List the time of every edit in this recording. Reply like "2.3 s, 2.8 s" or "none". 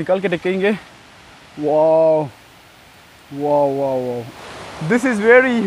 4.4 s